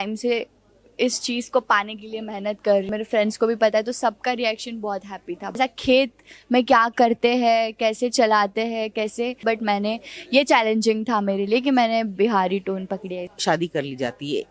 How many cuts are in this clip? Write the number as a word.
four